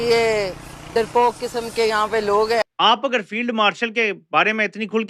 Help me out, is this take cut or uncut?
uncut